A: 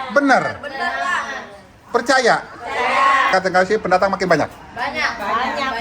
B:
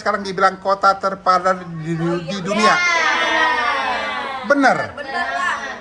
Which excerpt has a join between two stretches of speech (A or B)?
A